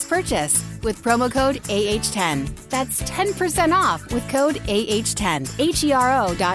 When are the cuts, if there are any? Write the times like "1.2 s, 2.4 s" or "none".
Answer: 5.4 s